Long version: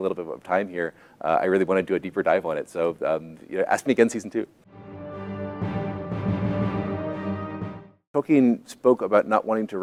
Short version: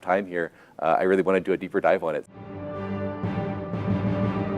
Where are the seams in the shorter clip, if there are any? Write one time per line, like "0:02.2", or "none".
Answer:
0:02.2